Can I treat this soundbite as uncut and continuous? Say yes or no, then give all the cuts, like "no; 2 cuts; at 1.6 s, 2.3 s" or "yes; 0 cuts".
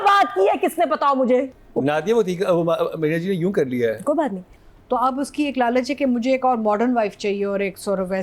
no; 2 cuts; at 1.6 s, 4.5 s